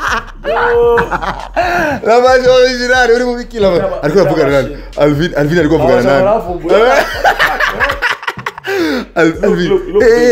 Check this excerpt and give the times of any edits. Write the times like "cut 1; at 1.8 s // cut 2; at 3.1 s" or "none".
none

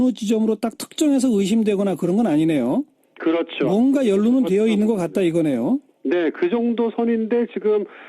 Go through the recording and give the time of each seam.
cut 1; at 2.0 s

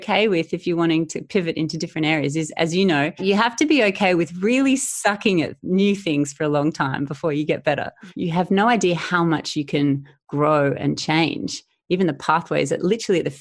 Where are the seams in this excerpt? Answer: cut 1; at 3.2 s // cut 2; at 8.0 s

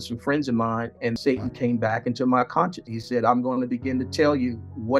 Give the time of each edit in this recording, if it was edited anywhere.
cut 1; at 1.2 s

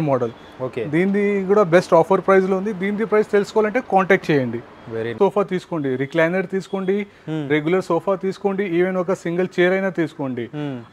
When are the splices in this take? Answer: cut 1; at 5.1 s

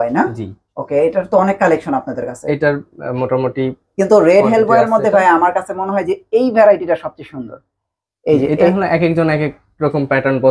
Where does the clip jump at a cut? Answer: none

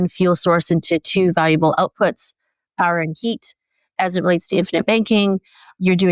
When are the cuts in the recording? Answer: none

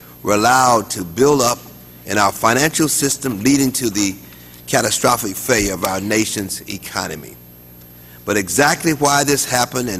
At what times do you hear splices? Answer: cut 1; at 1.7 s

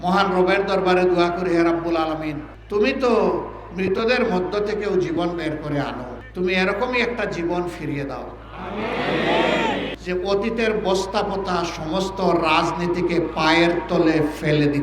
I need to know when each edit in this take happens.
cut 1; at 9.9 s

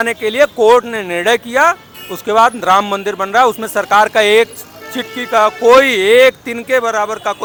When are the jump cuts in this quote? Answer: none

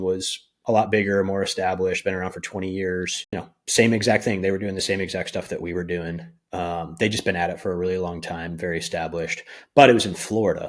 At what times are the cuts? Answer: cut 1; at 3.3 s

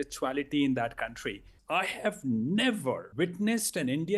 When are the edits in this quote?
cut 1; at 1.5 s // cut 2; at 3.1 s

